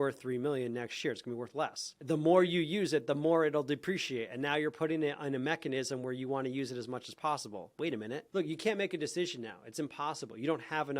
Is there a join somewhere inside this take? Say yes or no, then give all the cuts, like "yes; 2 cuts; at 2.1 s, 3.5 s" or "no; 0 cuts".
yes; 2 cuts; at 2.0 s, 8.2 s